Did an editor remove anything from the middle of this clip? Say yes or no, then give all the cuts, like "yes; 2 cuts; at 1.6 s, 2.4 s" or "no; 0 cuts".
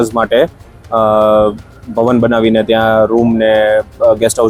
no; 0 cuts